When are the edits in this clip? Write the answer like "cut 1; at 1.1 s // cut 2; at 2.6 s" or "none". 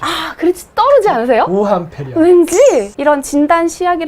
cut 1; at 2.9 s